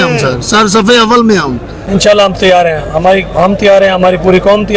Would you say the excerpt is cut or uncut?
cut